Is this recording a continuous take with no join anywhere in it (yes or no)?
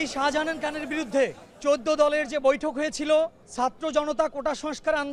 no